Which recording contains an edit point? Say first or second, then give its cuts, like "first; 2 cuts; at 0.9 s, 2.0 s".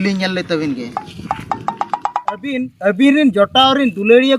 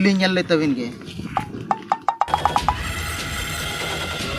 first; 2 cuts; at 1.1 s, 2.7 s